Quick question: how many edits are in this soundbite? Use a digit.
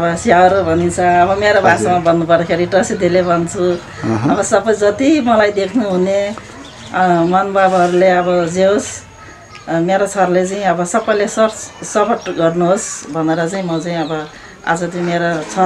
0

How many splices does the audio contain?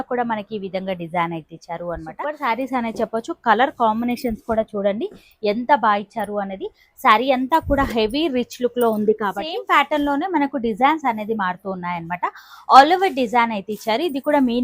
2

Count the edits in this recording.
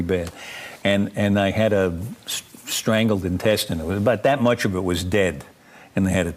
1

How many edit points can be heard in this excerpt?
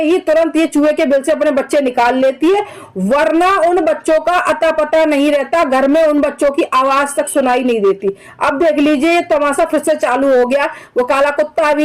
0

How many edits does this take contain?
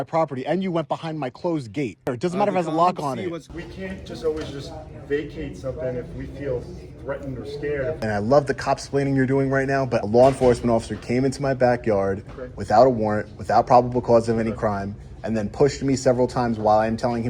4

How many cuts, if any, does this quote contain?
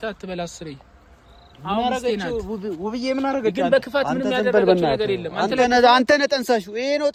0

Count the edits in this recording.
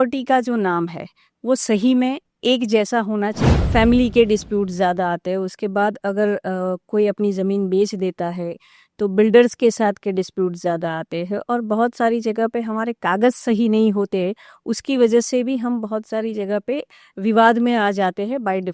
1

